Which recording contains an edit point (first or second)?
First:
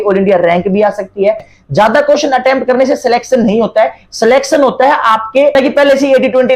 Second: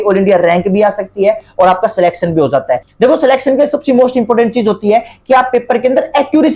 first